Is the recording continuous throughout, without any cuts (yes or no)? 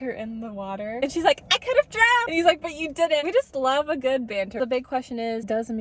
no